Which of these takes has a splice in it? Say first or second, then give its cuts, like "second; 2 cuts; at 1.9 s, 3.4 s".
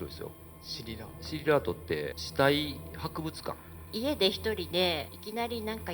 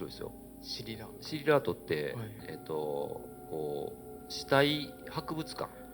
first; 3 cuts; at 2.2 s, 3.8 s, 5.1 s